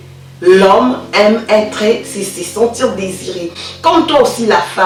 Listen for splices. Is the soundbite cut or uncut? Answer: uncut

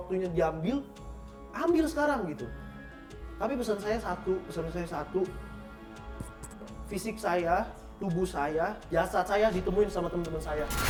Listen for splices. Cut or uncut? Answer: uncut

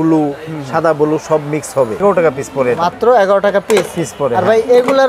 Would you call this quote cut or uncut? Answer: cut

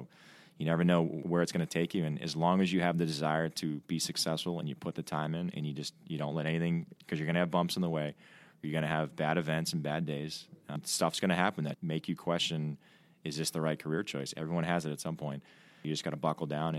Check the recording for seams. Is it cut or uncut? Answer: cut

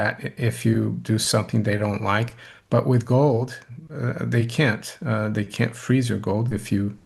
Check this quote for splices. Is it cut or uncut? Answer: uncut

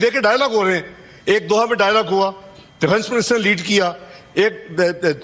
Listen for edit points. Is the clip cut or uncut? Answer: uncut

